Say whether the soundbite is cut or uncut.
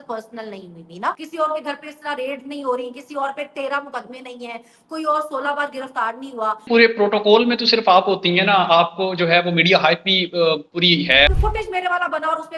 cut